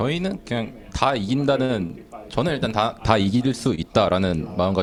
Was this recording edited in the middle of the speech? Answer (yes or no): no